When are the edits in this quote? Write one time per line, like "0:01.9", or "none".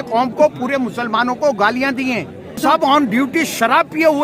0:02.6